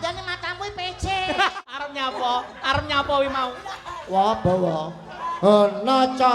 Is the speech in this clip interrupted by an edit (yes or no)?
yes